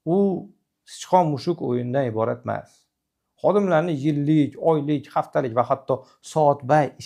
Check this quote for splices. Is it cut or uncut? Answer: uncut